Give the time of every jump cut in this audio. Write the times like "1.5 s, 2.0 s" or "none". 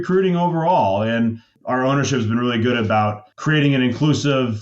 1.5 s, 3.3 s